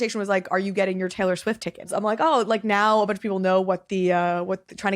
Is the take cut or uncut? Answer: cut